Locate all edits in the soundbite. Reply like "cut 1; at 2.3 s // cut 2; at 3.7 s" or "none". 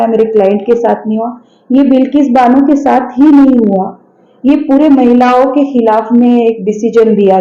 none